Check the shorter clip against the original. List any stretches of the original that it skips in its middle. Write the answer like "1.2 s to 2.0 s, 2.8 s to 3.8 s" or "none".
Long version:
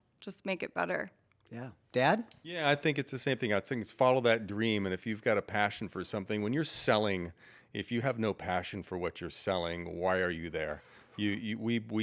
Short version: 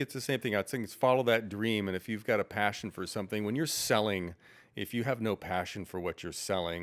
none